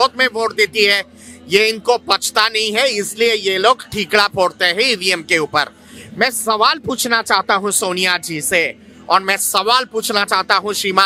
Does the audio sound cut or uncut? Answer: uncut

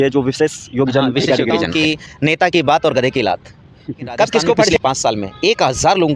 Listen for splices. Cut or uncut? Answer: cut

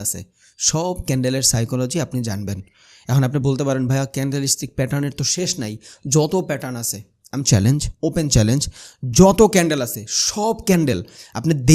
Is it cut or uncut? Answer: uncut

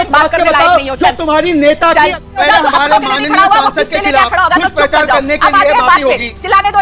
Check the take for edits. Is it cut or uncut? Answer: cut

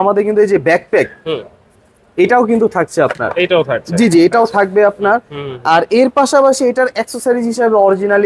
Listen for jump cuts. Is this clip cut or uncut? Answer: uncut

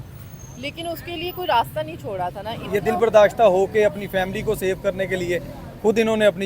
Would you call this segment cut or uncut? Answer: cut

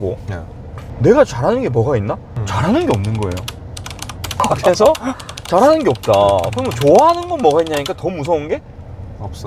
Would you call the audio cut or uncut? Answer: cut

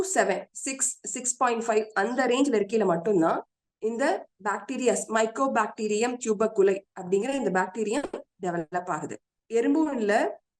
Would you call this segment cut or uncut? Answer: cut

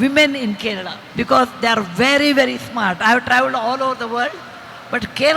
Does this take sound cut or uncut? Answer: cut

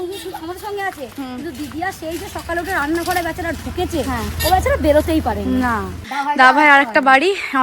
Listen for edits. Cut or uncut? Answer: uncut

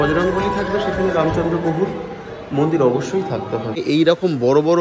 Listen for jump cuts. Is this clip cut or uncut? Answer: cut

